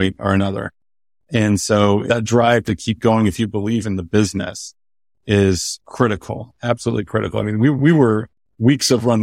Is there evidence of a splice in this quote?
yes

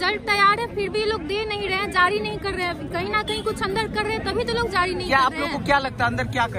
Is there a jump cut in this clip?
no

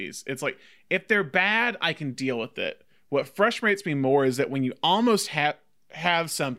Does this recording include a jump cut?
no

